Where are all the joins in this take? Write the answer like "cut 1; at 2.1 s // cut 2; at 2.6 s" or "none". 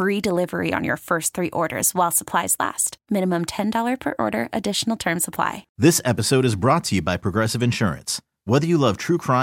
cut 1; at 5.7 s